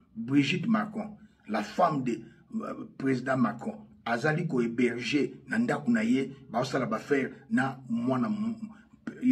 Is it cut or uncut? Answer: uncut